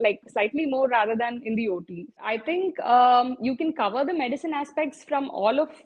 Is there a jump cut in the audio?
yes; 1 cut; at 2.2 s

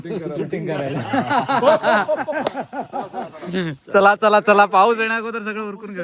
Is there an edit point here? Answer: no; 0 cuts

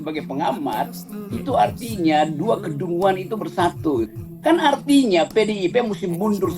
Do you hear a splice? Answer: yes; 1 cut; at 4.1 s

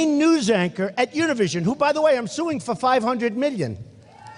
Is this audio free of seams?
yes; 0 cuts

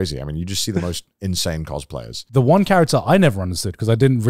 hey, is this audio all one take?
no; 1 cut; at 2.1 s

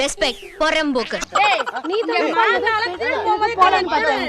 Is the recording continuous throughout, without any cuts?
yes; 0 cuts

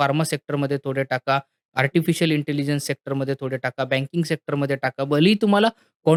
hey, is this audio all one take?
yes; 0 cuts

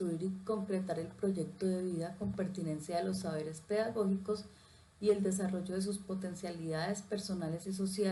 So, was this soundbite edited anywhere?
no; 0 cuts

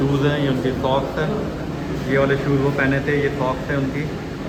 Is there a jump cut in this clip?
no; 0 cuts

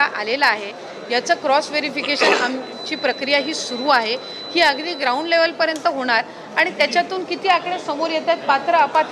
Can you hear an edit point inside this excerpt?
no; 0 cuts

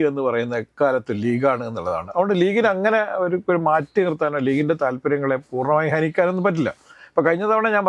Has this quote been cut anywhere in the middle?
no; 0 cuts

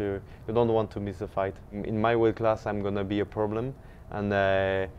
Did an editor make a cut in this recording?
yes; 1 cut; at 1.8 s

